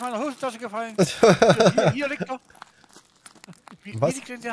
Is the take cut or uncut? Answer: uncut